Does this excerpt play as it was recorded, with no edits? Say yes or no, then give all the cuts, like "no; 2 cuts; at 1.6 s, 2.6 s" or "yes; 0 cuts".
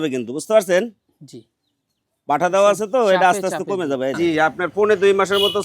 no; 1 cut; at 4.2 s